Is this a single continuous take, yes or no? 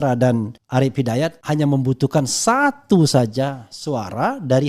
no